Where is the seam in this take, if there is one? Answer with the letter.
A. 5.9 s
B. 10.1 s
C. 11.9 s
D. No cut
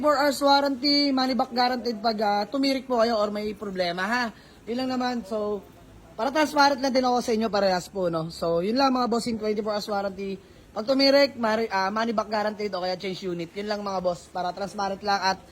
D